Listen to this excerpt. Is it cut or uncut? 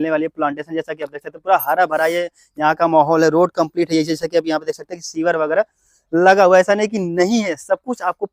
uncut